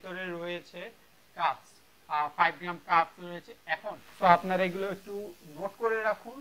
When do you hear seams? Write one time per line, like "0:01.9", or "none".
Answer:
0:04.0